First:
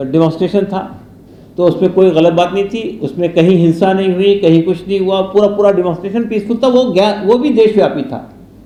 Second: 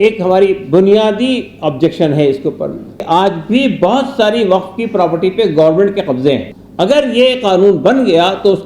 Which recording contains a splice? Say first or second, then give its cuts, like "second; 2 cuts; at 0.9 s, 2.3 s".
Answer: second; 2 cuts; at 3.0 s, 6.6 s